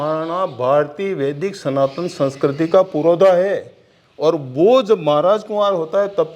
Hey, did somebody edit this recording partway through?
no; 0 cuts

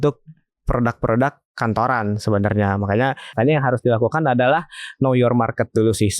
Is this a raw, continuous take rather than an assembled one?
no; 1 cut; at 3.2 s

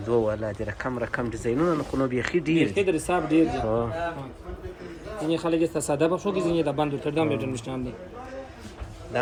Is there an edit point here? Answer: no; 0 cuts

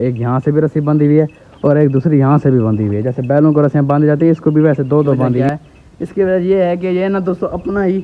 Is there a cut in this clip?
yes; 1 cut; at 5.5 s

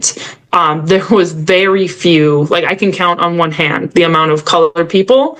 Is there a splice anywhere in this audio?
no; 0 cuts

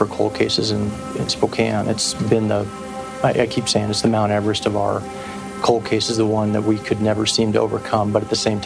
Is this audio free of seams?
yes; 0 cuts

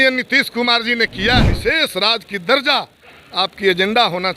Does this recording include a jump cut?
yes; 1 cut; at 1.5 s

